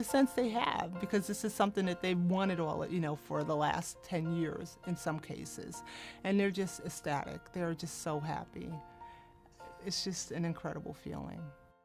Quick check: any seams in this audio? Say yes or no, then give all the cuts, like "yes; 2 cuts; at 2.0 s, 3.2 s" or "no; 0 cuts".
yes; 1 cut; at 7.4 s